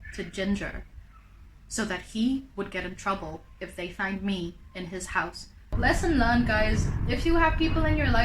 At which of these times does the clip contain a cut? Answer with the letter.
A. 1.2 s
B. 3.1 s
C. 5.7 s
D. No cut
C